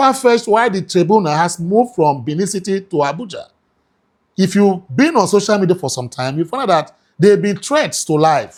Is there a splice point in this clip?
no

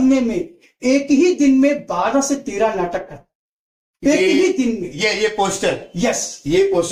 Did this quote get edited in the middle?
no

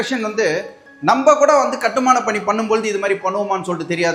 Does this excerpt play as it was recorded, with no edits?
yes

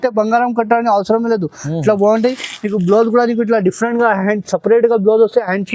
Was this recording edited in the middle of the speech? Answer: no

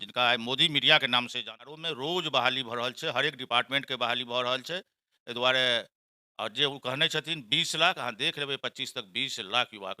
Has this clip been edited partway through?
yes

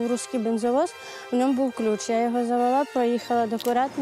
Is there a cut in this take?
no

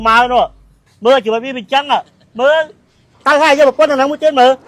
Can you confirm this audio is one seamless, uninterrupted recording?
no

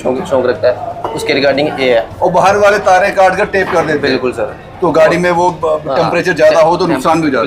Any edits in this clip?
no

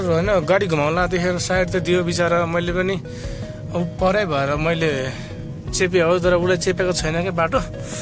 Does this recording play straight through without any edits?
yes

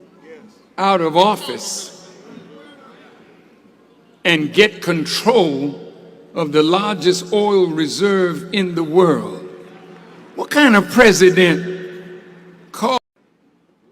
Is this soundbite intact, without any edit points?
no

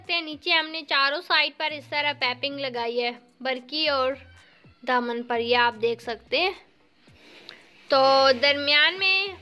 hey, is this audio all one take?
yes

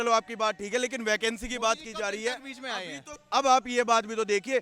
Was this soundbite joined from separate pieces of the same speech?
no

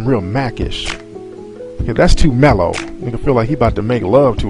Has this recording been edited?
no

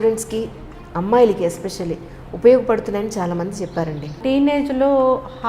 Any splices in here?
yes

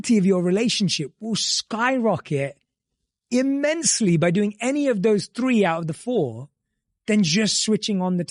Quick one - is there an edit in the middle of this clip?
no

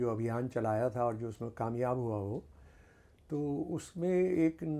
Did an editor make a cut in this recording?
no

